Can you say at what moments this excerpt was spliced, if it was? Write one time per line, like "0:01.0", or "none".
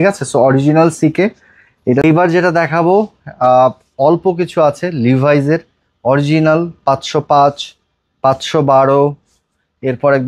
0:02.0